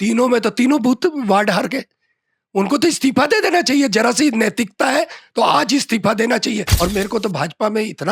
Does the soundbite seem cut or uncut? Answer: cut